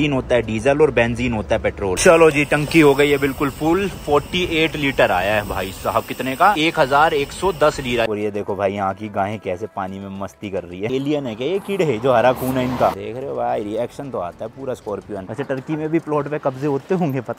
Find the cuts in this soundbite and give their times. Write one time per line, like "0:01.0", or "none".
0:02.0
0:06.6
0:08.1
0:10.9
0:13.0
0:15.3